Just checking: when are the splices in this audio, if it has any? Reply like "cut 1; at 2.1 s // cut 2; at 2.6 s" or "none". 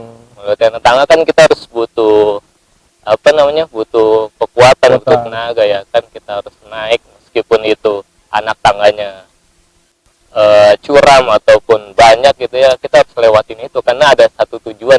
none